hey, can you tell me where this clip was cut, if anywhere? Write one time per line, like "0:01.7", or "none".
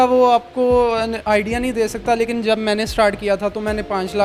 none

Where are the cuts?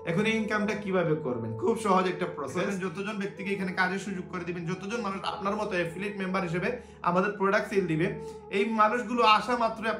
0:02.7

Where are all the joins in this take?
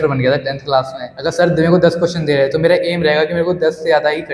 0:01.0

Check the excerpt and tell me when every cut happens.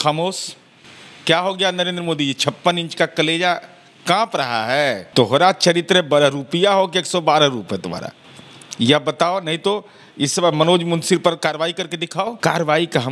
0:05.0
0:12.3

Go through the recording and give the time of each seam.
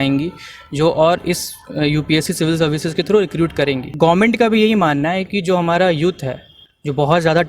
0:03.9

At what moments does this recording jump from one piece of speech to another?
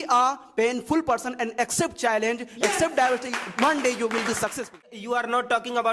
0:05.0

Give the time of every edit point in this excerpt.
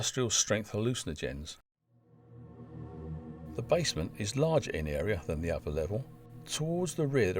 0:01.8

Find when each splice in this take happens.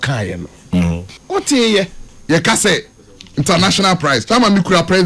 0:01.1
0:02.1

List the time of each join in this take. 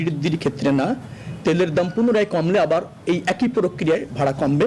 none

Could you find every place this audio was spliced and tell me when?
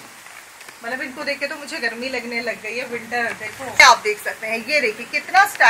0:03.8

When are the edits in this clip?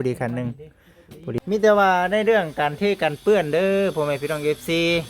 0:01.4

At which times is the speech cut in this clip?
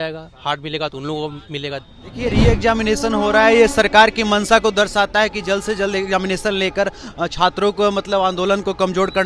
0:02.2

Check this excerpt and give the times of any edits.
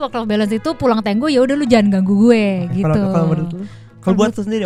none

